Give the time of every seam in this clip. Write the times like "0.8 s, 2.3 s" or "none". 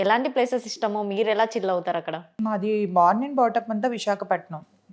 2.4 s